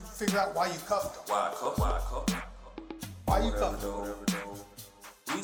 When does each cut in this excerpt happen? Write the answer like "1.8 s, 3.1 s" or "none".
none